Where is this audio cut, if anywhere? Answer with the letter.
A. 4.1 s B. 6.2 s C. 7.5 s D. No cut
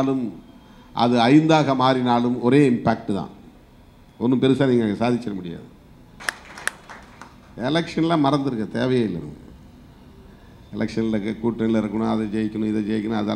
B